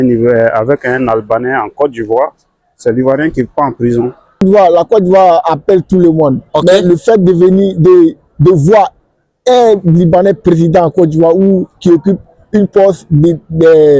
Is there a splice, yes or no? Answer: yes